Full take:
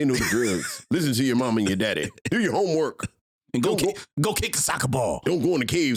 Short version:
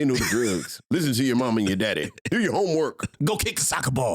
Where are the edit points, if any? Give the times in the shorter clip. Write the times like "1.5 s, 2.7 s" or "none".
3.1 s